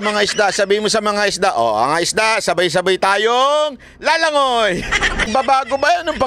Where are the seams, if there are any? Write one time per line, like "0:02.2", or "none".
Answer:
0:05.3